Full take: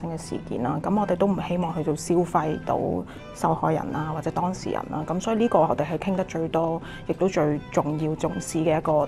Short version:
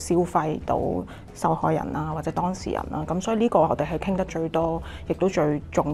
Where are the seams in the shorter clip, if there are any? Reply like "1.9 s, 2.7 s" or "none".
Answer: none